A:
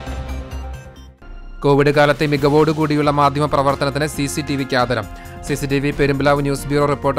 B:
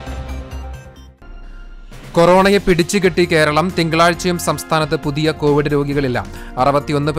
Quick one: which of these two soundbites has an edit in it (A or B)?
B